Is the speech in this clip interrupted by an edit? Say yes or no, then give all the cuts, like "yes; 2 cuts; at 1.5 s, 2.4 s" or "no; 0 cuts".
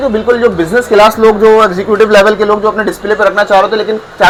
no; 0 cuts